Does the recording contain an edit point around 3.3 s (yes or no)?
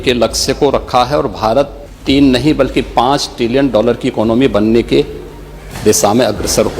no